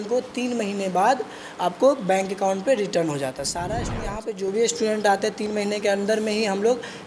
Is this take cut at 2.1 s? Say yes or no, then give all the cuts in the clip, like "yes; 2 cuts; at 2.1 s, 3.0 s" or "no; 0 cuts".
no; 1 cut; at 3.7 s